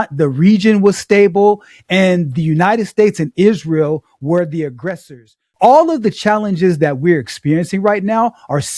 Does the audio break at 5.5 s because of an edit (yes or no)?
yes